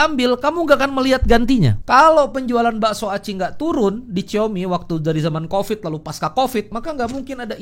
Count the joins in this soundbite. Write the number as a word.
two